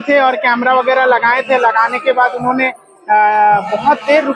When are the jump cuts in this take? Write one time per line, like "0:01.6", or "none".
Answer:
none